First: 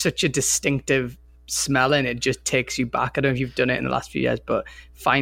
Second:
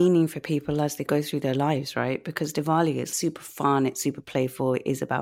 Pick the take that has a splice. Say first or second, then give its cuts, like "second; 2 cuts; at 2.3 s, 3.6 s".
second; 2 cuts; at 1.1 s, 3.1 s